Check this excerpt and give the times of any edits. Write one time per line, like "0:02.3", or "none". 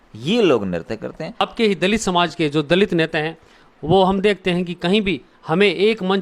0:01.5

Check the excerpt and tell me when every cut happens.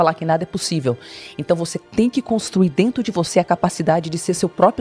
none

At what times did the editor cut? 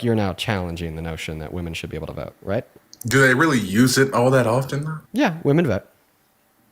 0:02.8
0:04.9

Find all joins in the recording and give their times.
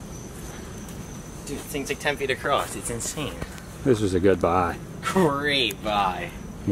none

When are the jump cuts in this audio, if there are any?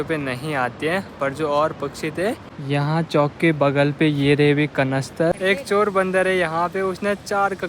0:02.6
0:05.3

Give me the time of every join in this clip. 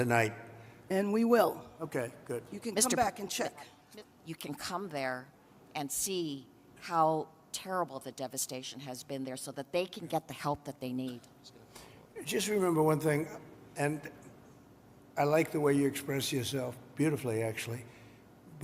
0:03.8

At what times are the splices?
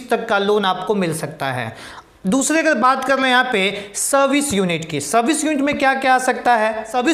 none

